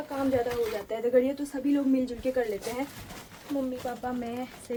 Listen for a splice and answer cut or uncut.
uncut